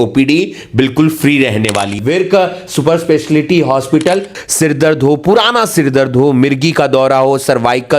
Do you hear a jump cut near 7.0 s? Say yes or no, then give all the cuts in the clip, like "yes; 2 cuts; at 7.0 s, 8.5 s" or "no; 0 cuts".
no; 2 cuts; at 1.9 s, 4.3 s